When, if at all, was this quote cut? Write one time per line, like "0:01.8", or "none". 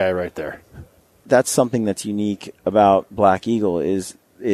0:01.2